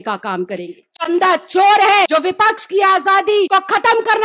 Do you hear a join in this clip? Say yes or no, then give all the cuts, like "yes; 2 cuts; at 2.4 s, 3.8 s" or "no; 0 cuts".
yes; 3 cuts; at 1.1 s, 2.1 s, 3.5 s